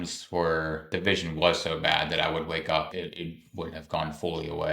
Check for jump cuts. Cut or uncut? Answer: cut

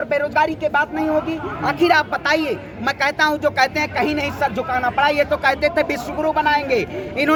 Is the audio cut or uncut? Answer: uncut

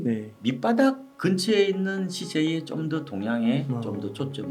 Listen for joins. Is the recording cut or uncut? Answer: uncut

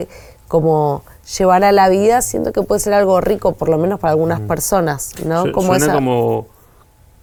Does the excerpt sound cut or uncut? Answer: uncut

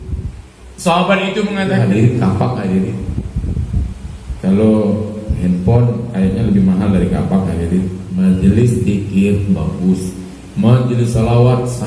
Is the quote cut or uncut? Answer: cut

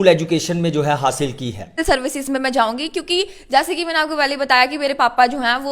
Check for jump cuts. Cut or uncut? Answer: cut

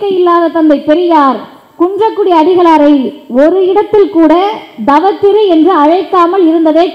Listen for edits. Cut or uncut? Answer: uncut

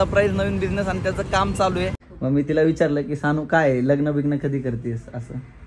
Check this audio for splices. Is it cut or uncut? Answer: cut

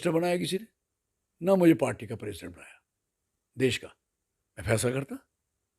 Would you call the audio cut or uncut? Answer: uncut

